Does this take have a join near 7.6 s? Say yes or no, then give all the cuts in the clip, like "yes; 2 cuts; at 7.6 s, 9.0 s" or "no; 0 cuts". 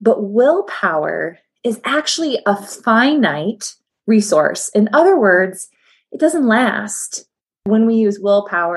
yes; 1 cut; at 7.6 s